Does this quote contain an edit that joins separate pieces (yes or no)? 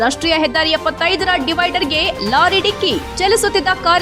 no